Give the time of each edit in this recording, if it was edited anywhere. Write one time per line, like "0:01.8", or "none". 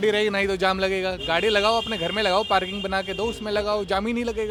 none

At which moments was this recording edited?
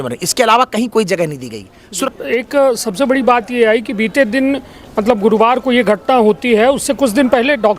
0:02.1

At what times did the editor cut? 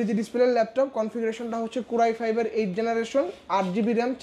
none

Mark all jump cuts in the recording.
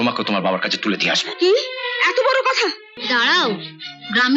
0:02.9

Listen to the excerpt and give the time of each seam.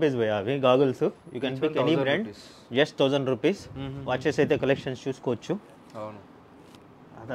none

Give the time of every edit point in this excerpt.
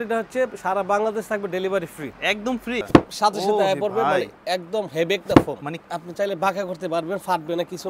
0:02.8
0:05.9

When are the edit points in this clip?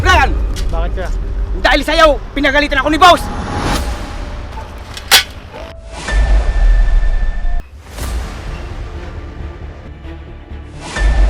0:07.6
0:09.9

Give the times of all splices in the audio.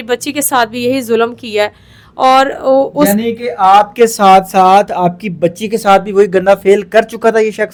none

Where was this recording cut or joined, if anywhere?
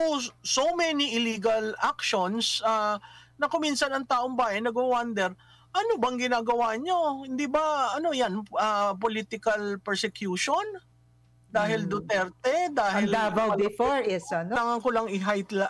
0:14.6

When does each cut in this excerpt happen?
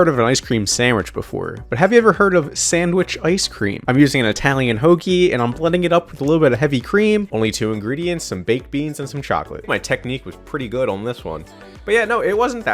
0:03.8
0:07.3
0:09.7

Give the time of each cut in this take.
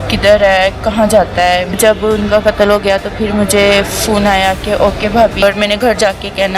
0:05.4

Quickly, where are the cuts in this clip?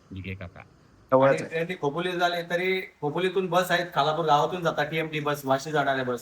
0:01.1

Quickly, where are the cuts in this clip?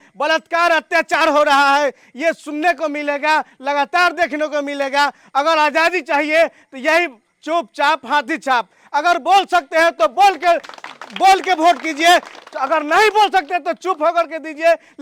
none

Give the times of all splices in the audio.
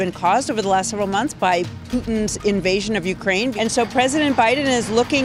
0:03.5

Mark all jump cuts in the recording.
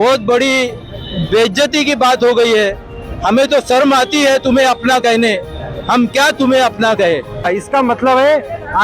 0:07.5

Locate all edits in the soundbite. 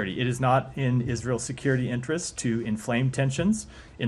0:03.0

